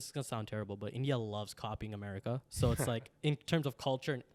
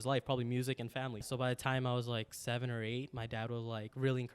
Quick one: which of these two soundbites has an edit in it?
second; 1 cut; at 1.3 s

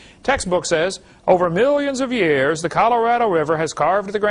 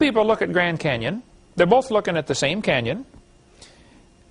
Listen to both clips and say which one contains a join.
second; 1 cut; at 2.6 s

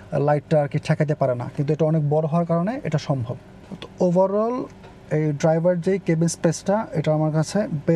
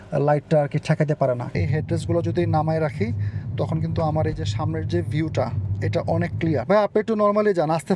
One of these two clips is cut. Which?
second; 2 cuts; at 1.5 s, 6.6 s

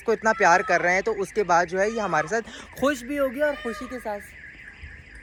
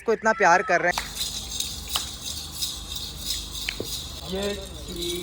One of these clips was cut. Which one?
second; 2 cuts; at 0.9 s, 4.2 s

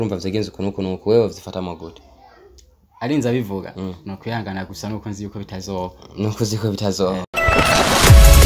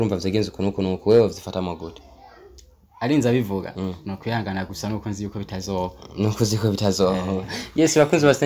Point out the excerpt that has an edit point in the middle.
first; 1 cut; at 7.2 s

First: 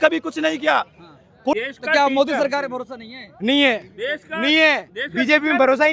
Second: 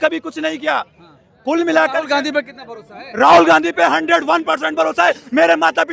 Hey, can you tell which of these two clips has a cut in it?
first; 1 cut; at 1.5 s

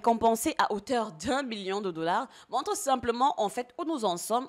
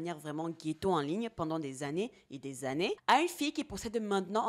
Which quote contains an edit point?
second; 1 cut; at 3.0 s

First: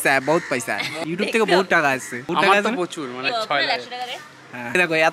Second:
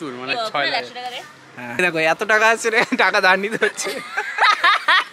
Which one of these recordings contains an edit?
first; 1 cut; at 0.9 s

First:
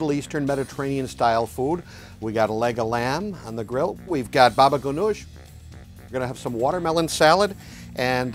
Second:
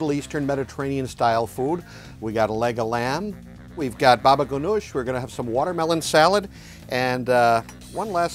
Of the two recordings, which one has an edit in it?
second; 2 cuts; at 3.6 s, 5.0 s

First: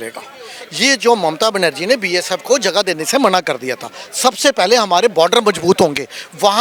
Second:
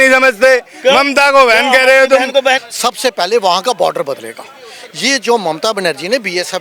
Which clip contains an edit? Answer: second; 1 cut; at 2.6 s

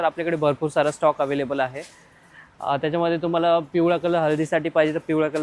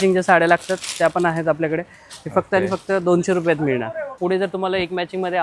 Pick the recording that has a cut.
second; 1 cut; at 4.1 s

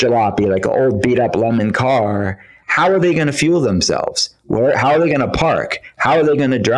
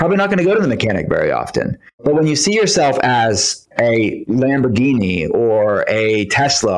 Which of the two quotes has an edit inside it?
second; 2 cuts; at 1.8 s, 3.9 s

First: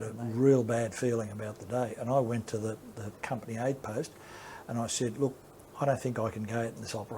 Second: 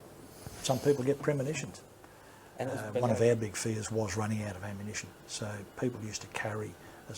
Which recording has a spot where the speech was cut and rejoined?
second; 1 cut; at 2.9 s

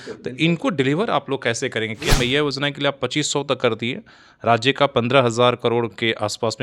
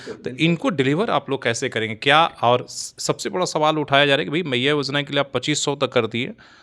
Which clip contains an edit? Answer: first; 1 cut; at 2.0 s

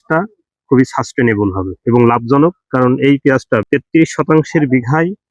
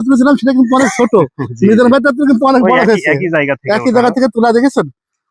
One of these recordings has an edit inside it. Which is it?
first; 1 cut; at 3.6 s

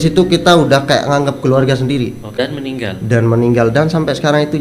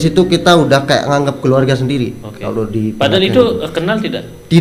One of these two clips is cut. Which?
first; 1 cut; at 2.2 s

